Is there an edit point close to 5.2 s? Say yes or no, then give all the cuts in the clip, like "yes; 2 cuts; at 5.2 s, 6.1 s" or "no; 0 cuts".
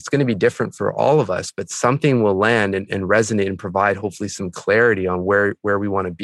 no; 0 cuts